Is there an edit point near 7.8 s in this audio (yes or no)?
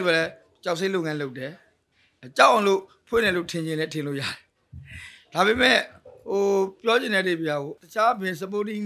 yes